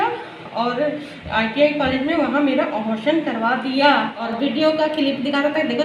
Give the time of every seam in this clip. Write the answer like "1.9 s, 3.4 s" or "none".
4.2 s